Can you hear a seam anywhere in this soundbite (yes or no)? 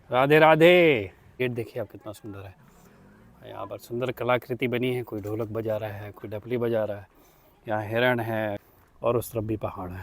yes